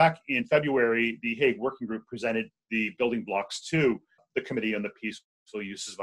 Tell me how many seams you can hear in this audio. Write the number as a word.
one